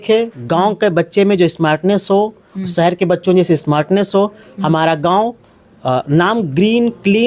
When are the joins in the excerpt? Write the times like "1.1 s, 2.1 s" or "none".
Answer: none